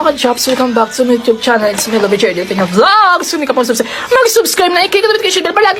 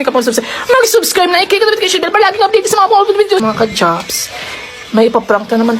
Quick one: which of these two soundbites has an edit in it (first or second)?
second